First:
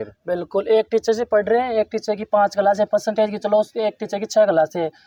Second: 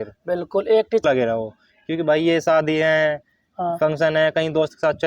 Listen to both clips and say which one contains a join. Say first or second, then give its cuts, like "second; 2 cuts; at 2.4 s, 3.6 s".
second; 1 cut; at 1.0 s